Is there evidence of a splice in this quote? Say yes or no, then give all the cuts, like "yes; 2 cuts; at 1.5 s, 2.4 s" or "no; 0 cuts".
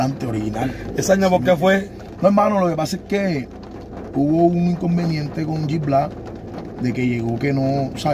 no; 0 cuts